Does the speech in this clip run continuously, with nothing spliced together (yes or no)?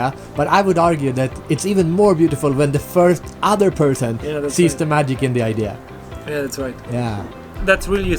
yes